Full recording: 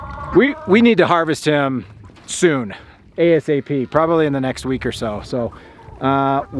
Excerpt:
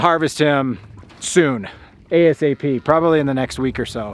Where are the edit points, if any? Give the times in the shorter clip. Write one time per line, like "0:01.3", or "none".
none